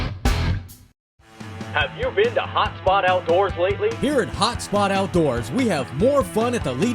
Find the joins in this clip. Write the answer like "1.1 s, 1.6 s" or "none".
0.9 s